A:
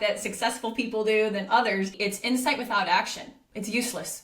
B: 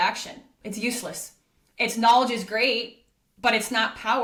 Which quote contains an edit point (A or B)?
A